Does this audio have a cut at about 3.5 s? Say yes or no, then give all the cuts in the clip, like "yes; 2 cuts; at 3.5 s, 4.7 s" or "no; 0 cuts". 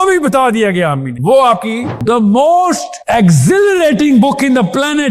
no; 1 cut; at 1.9 s